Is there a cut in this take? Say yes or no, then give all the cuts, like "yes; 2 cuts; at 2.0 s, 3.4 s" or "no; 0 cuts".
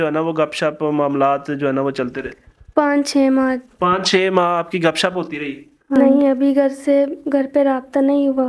yes; 1 cut; at 6.0 s